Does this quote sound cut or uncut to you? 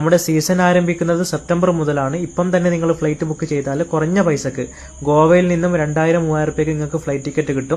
cut